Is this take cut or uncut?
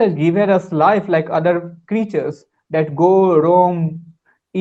uncut